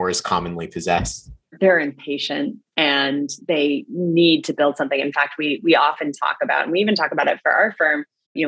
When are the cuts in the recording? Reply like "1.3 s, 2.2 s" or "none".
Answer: 1.5 s